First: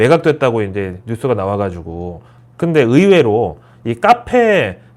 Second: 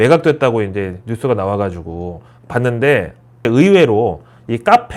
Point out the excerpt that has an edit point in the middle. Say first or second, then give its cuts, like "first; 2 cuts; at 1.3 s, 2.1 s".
first; 1 cut; at 2.5 s